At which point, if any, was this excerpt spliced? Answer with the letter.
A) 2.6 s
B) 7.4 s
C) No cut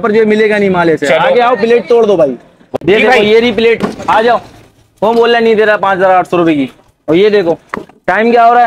A